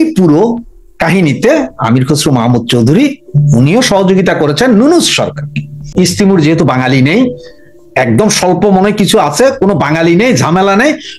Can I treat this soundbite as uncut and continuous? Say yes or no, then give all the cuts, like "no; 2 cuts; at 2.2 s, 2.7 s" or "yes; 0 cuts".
no; 1 cut; at 5.9 s